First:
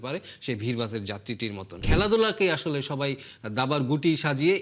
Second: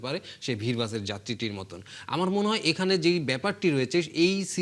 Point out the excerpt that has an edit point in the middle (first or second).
first